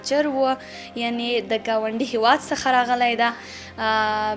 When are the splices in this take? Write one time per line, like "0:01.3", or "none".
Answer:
none